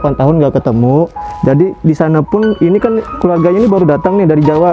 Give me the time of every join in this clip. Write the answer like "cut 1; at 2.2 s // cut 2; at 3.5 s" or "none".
none